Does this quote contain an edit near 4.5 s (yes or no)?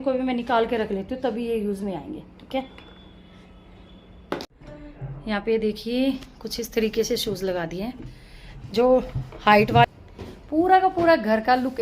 yes